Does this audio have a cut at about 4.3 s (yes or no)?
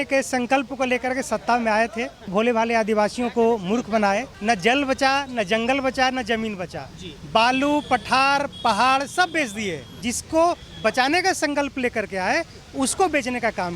yes